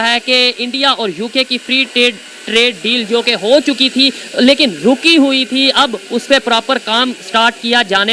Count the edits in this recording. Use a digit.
0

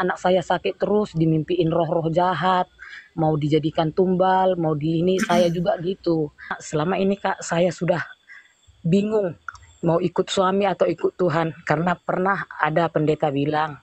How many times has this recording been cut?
1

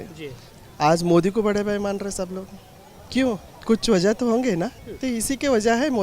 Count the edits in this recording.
2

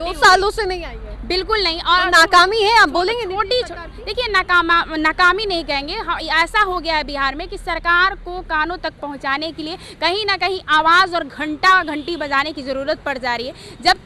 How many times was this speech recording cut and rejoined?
0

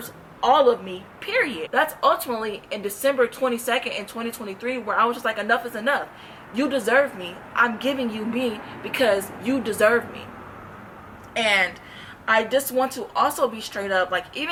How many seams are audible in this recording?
0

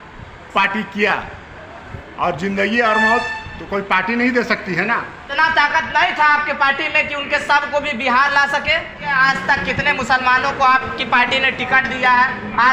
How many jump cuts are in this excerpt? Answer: 2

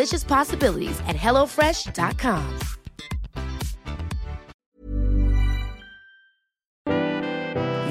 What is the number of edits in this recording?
1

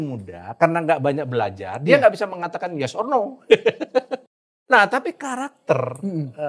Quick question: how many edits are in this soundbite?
1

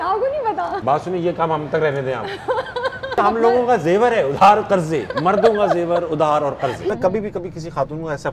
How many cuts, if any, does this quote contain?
3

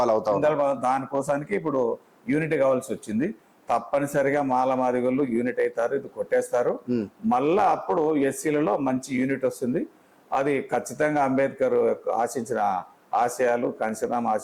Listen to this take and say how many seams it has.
0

